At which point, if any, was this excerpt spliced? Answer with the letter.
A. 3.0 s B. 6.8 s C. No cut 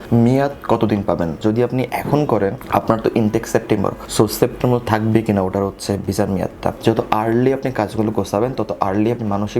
B